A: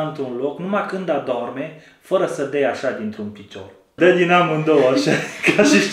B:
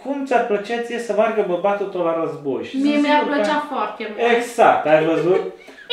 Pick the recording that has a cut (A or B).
A